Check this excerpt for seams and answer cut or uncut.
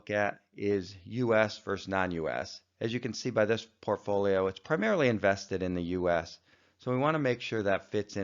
cut